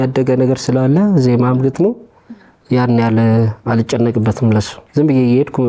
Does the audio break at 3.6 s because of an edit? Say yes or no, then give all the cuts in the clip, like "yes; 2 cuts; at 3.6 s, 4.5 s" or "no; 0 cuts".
no; 1 cut; at 4.8 s